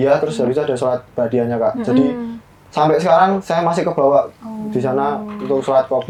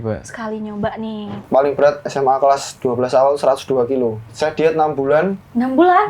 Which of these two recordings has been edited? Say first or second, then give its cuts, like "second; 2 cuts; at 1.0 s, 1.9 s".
second; 2 cuts; at 1.3 s, 4.3 s